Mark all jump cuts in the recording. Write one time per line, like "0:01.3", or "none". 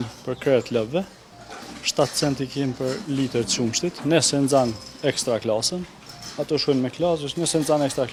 none